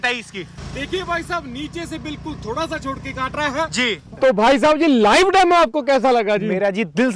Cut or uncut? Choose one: uncut